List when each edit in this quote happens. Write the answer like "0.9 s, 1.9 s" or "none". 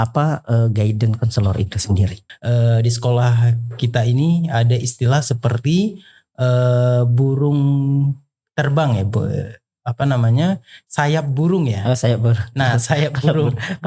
2.3 s

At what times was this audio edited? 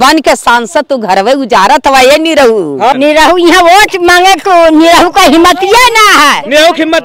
2.9 s

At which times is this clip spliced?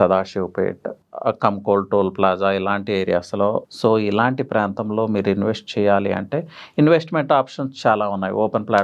0.9 s, 3.7 s

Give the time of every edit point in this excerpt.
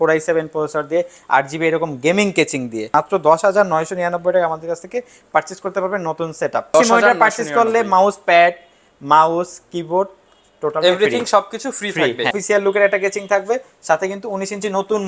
2.9 s, 6.7 s, 12.4 s

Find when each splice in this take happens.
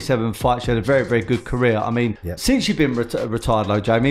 2.3 s

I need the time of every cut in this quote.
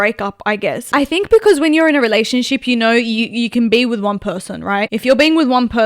0.8 s, 4.9 s

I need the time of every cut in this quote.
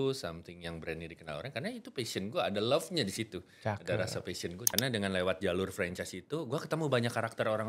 4.6 s

